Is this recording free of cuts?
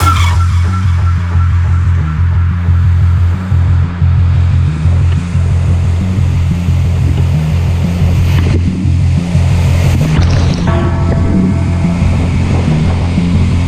yes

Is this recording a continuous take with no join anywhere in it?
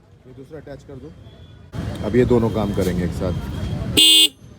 no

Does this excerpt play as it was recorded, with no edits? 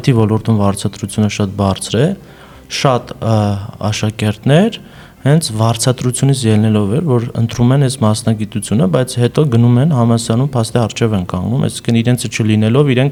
yes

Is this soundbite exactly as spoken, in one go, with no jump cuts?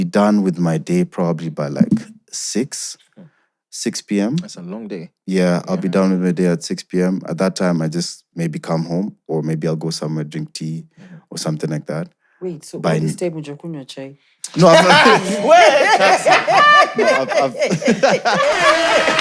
yes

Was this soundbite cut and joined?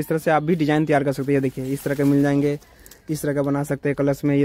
no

